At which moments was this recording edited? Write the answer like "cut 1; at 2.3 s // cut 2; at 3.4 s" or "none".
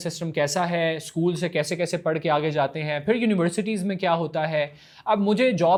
none